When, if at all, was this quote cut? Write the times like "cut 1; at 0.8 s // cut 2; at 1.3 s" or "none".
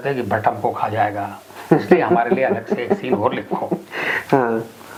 none